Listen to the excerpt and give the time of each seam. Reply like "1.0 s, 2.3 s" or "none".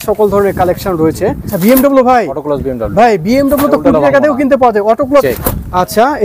1.5 s, 5.2 s